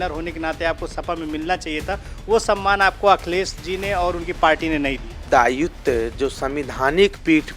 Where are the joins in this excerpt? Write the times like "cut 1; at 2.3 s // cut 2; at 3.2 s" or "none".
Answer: cut 1; at 5.2 s

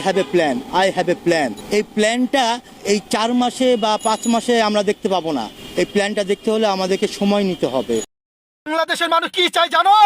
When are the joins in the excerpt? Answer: cut 1; at 8.1 s

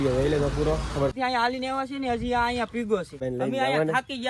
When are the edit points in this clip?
cut 1; at 1.1 s // cut 2; at 3.2 s

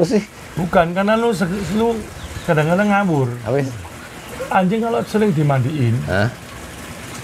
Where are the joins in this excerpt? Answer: cut 1; at 3.4 s

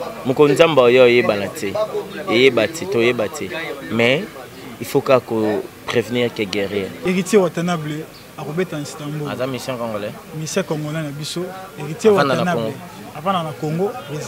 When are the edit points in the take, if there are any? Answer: cut 1; at 6.9 s

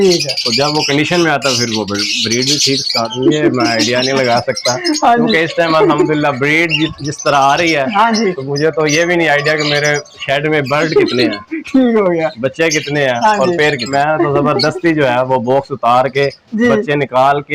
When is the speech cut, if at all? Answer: cut 1; at 3.0 s // cut 2; at 13.9 s

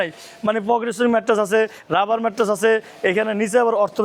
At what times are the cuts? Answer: none

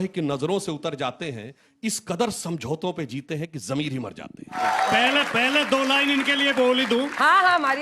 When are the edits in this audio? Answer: cut 1; at 4.6 s

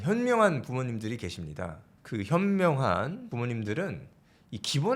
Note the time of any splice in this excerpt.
cut 1; at 1.9 s // cut 2; at 3.3 s

